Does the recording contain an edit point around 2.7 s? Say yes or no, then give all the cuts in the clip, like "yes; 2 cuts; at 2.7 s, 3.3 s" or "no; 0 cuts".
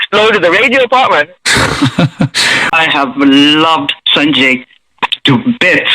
yes; 1 cut; at 2.7 s